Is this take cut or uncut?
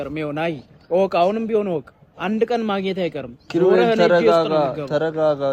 uncut